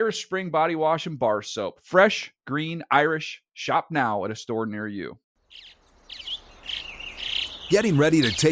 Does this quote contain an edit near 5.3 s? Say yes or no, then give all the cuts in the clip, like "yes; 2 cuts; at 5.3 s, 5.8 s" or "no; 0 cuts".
yes; 1 cut; at 5.3 s